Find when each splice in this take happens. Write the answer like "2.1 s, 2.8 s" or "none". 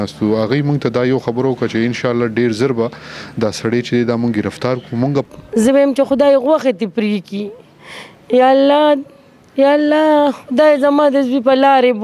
5.3 s